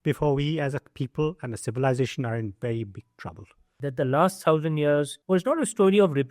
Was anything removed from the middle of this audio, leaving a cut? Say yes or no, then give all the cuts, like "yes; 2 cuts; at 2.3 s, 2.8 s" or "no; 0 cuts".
yes; 2 cuts; at 3.7 s, 5.2 s